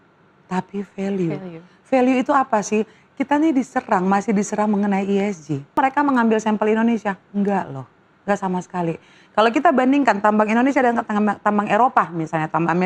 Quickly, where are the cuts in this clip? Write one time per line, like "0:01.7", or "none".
0:05.8